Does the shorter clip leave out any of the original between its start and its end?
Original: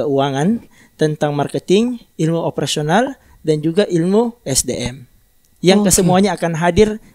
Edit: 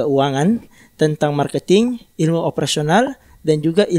no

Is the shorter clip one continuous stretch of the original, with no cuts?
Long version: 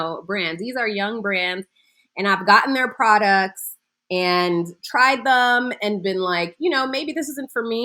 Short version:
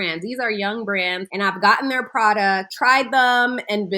no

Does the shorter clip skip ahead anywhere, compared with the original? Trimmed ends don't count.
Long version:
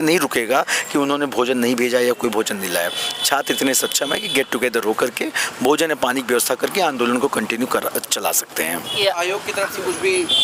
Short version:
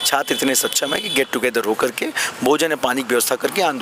no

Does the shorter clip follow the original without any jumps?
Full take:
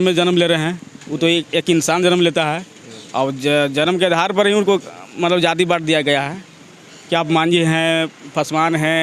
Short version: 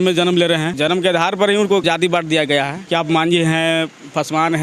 no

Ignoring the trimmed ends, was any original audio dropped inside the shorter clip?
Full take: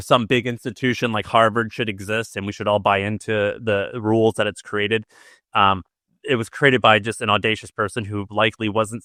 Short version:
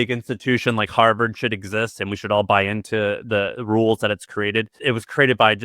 yes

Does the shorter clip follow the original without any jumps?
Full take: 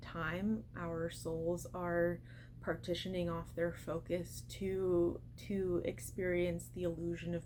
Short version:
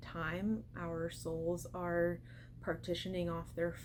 yes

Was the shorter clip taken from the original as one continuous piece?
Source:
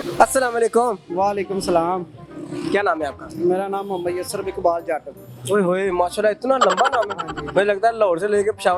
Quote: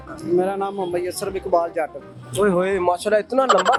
yes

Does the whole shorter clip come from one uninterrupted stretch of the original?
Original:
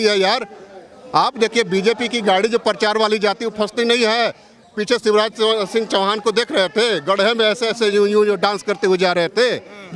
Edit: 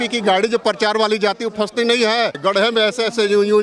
no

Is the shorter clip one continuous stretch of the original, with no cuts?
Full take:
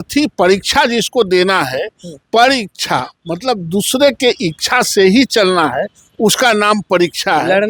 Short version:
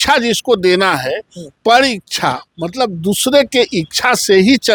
yes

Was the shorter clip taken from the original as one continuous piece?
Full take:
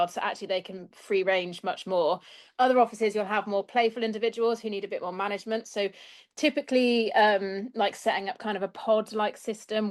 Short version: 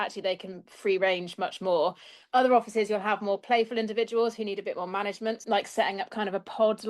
no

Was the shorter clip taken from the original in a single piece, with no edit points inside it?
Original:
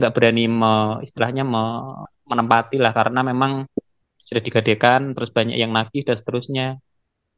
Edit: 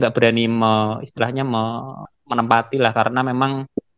yes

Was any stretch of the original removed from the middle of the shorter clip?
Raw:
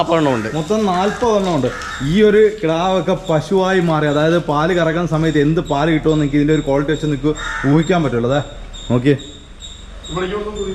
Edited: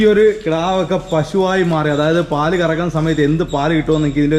no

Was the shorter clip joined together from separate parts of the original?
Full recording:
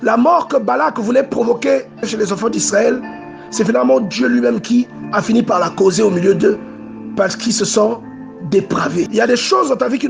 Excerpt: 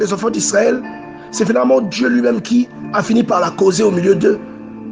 no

